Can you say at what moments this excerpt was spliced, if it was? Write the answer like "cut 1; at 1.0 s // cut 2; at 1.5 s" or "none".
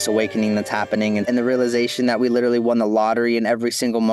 cut 1; at 1.3 s